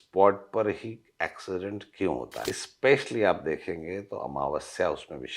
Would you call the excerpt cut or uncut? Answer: cut